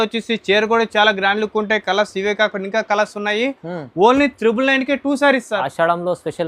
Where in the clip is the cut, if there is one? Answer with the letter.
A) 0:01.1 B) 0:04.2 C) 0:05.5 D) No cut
D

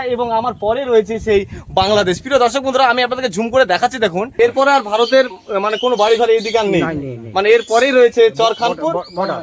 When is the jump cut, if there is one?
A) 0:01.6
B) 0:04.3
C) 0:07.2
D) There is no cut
B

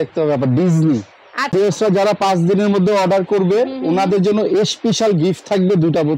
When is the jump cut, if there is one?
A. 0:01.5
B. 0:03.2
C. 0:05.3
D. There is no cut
A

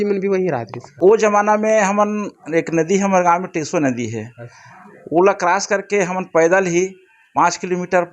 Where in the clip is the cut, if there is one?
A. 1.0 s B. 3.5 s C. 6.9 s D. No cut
A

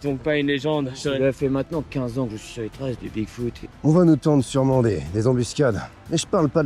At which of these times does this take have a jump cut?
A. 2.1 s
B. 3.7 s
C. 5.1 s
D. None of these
B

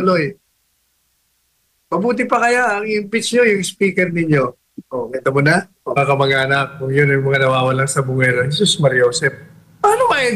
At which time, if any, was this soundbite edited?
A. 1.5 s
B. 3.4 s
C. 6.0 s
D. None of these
C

